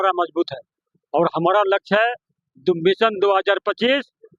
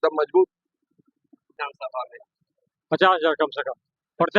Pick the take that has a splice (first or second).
second